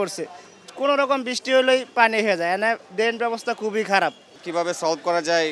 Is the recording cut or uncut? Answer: cut